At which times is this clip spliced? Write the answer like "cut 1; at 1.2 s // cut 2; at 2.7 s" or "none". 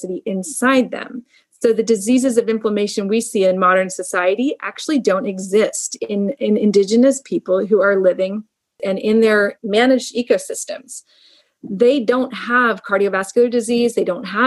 cut 1; at 8.8 s // cut 2; at 9.6 s